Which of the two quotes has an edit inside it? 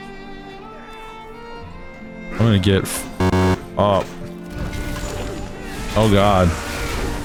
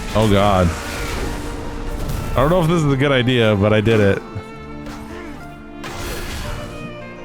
second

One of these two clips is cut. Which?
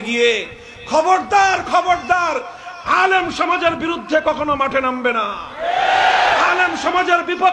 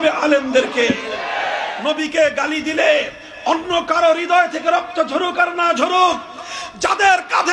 second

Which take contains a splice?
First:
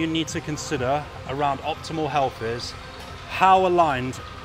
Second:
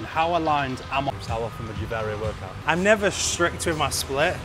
second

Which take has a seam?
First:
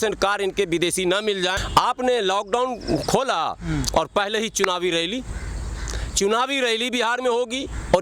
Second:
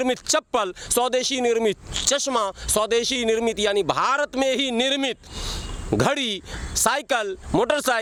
first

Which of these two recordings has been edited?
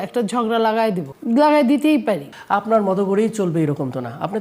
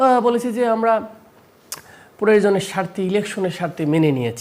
first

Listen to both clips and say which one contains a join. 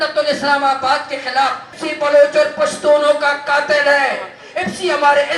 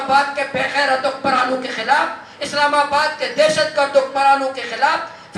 first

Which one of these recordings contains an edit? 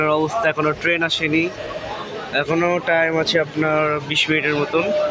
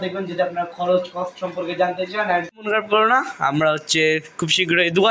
second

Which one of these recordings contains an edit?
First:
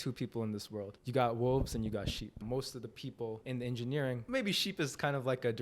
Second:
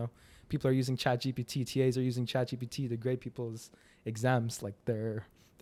first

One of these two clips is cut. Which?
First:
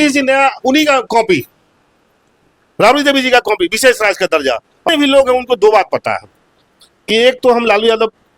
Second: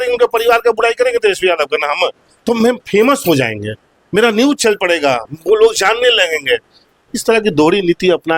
first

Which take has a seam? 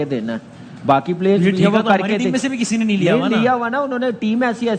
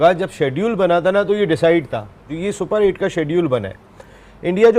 second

